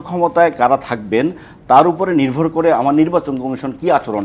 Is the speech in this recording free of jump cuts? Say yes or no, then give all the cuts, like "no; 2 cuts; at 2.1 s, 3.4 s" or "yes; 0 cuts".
yes; 0 cuts